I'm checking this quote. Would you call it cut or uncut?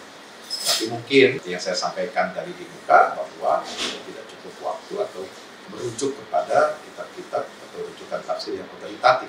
cut